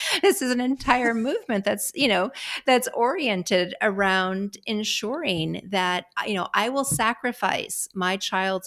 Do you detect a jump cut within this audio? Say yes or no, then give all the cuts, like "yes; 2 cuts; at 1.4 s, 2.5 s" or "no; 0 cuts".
no; 0 cuts